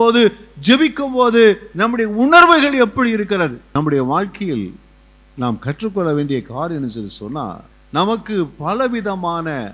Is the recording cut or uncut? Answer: cut